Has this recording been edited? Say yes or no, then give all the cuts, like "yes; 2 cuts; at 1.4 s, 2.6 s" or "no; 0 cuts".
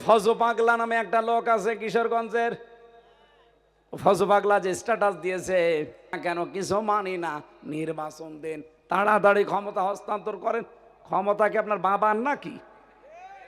yes; 1 cut; at 6.1 s